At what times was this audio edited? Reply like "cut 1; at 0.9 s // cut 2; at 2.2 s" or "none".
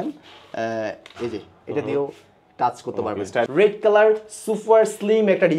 cut 1; at 3.5 s